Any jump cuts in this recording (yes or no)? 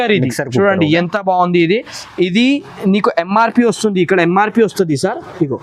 no